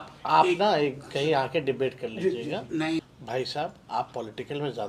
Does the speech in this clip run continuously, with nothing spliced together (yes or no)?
no